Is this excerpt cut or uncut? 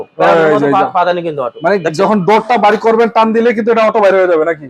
uncut